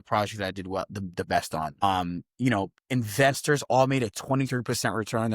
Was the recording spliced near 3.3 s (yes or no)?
no